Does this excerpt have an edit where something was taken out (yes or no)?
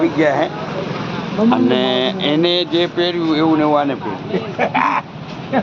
no